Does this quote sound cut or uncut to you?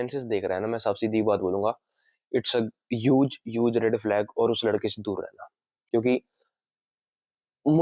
uncut